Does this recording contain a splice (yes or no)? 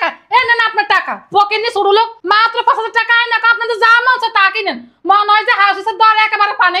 yes